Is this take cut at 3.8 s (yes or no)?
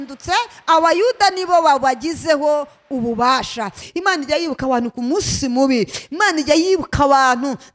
yes